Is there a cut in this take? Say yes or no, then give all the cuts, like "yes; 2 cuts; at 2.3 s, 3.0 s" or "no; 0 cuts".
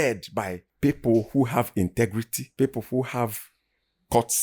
no; 0 cuts